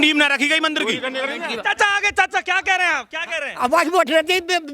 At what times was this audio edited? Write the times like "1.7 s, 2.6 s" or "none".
1.5 s